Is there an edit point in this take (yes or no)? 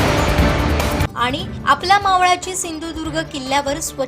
yes